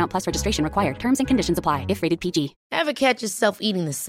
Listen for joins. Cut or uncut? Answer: cut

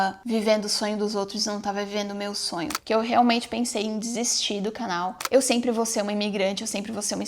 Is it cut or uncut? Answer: cut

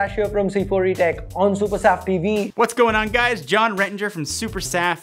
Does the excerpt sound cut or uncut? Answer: cut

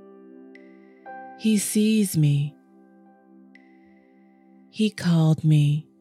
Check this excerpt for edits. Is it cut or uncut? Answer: cut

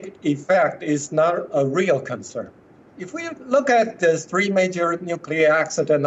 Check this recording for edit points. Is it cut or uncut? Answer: uncut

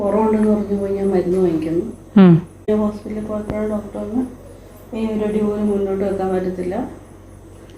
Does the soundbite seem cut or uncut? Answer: cut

